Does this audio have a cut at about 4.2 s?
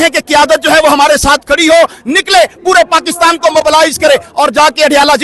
no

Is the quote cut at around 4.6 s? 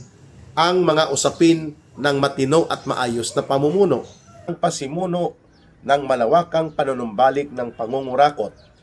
yes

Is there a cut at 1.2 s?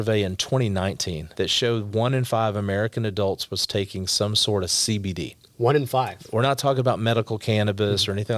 yes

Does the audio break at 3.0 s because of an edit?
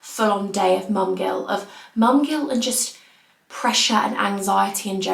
no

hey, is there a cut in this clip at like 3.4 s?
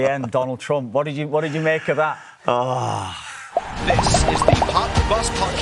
yes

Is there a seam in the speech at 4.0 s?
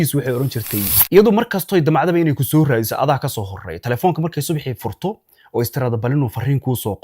no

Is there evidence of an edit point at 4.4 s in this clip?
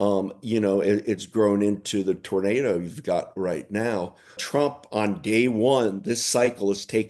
yes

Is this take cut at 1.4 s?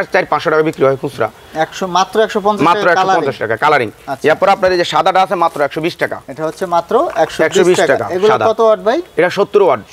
no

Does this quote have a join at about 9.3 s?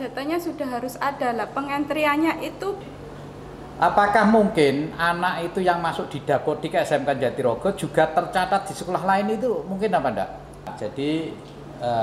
no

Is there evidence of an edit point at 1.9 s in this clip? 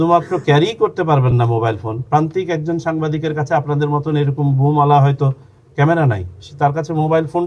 no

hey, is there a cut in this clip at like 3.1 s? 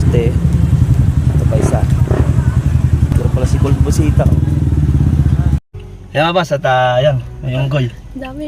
yes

